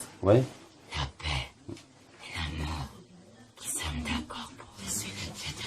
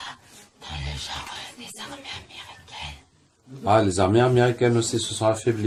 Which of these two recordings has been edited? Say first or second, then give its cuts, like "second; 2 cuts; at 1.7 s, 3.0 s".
first; 1 cut; at 4.8 s